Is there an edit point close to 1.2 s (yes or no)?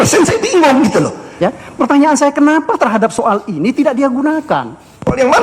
yes